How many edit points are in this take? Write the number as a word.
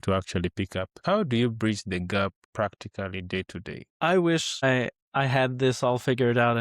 four